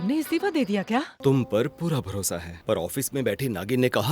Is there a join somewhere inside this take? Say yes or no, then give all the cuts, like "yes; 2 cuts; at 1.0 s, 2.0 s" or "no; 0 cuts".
yes; 1 cut; at 1.1 s